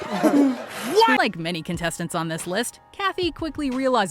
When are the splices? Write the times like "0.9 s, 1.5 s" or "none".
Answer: 1.2 s